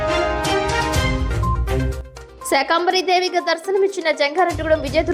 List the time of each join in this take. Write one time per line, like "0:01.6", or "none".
0:01.8